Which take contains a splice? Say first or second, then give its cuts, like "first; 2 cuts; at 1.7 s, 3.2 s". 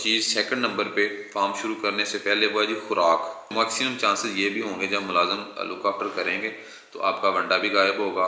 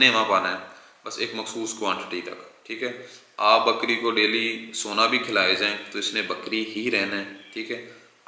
first; 1 cut; at 3.4 s